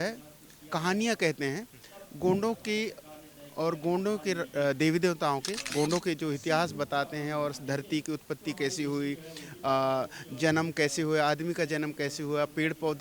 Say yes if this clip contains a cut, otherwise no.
yes